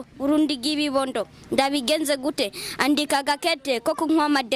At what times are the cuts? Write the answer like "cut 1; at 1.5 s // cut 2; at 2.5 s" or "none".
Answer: none